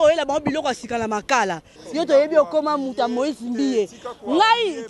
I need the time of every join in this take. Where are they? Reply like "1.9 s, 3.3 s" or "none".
1.8 s

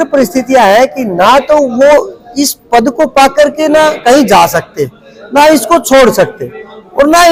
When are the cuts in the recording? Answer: none

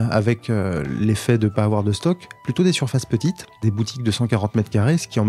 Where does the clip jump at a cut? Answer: 3.6 s

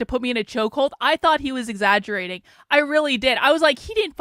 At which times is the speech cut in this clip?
none

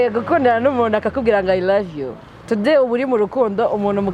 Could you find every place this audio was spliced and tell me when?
none

